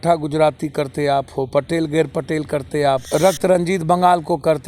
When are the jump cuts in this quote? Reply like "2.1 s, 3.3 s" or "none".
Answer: 3.0 s